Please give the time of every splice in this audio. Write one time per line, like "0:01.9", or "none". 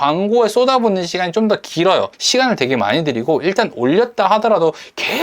0:02.1